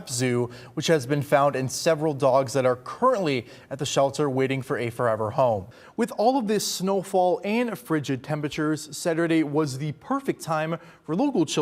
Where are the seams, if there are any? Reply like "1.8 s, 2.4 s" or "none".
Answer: 5.8 s